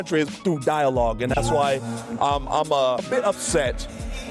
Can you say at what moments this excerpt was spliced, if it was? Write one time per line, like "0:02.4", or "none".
0:01.2
0:03.1